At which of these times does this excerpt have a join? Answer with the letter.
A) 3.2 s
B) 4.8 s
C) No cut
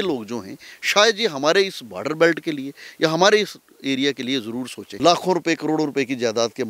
B